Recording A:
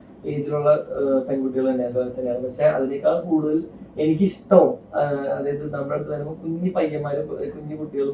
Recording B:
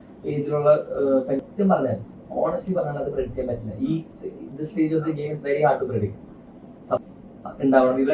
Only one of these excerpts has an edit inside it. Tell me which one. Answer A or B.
B